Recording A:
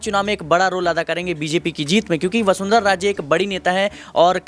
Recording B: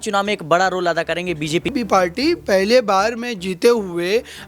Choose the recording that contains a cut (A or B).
B